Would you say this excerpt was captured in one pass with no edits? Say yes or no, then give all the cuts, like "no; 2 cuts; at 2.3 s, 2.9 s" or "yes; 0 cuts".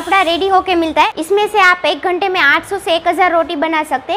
no; 1 cut; at 1.1 s